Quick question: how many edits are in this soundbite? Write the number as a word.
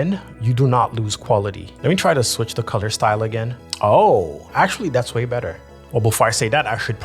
two